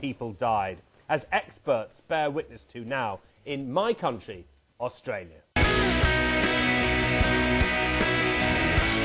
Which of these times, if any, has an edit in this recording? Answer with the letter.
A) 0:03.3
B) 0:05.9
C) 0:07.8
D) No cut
B